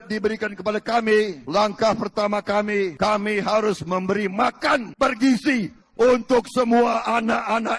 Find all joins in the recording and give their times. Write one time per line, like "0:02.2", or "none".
0:01.4
0:02.9
0:04.9